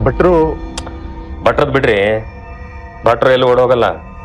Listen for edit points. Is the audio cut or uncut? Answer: uncut